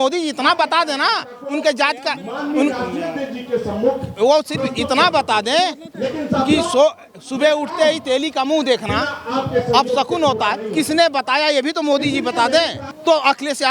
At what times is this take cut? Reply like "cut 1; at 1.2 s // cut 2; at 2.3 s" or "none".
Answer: cut 1; at 12.8 s